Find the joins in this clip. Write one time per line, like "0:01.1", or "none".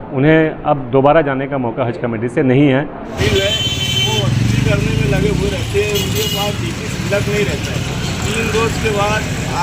0:03.2